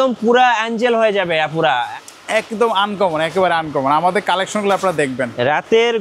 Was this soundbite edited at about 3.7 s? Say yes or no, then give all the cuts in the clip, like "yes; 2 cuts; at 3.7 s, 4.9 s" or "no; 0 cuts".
no; 1 cut; at 1.9 s